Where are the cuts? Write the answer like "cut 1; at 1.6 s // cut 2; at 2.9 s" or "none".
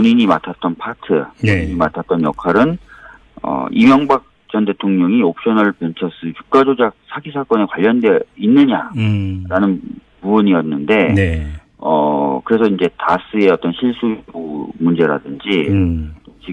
none